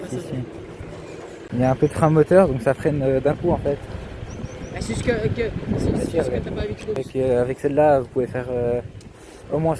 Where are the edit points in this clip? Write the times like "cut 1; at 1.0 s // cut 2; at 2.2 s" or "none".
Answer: cut 1; at 1.4 s // cut 2; at 7.0 s